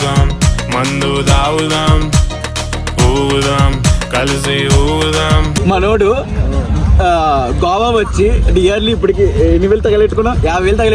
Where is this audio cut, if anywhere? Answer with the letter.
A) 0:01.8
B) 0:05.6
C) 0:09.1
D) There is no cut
B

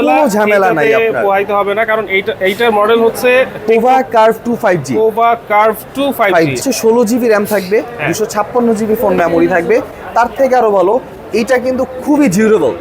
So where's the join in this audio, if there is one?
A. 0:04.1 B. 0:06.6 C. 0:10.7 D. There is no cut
B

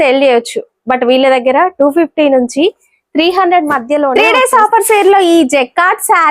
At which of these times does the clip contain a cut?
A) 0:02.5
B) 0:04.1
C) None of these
B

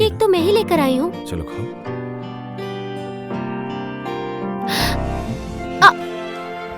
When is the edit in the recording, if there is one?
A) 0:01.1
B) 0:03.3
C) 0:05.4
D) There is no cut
C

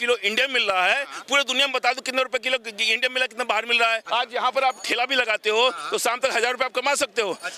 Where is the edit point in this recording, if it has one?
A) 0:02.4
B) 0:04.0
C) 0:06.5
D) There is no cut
B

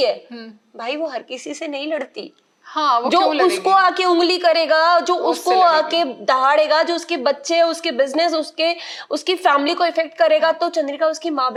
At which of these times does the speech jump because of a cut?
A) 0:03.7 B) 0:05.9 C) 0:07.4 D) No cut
D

